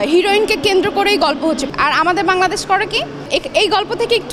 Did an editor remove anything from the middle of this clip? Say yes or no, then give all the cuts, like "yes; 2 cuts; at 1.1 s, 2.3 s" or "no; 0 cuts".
yes; 2 cuts; at 1.7 s, 3.3 s